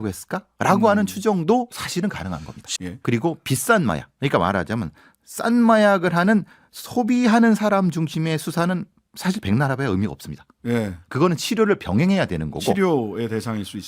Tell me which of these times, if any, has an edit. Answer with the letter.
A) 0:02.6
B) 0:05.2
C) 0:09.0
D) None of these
A